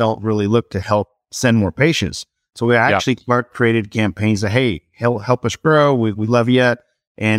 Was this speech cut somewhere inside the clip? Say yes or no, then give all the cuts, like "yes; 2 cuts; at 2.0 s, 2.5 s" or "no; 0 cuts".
no; 0 cuts